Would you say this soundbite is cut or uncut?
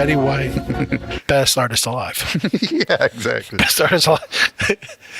uncut